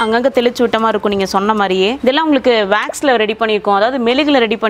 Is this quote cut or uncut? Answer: cut